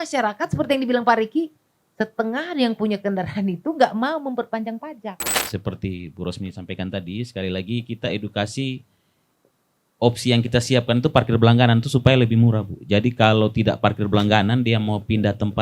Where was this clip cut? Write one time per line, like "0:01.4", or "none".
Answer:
0:05.3